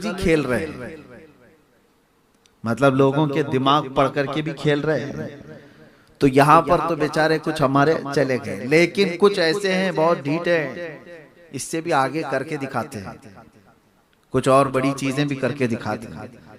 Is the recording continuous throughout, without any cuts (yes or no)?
yes